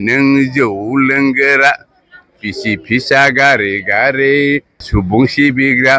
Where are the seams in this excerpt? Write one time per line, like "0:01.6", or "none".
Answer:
0:04.8